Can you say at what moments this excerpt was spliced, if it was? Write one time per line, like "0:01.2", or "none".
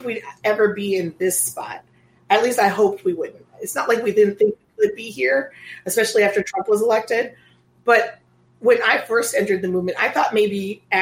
none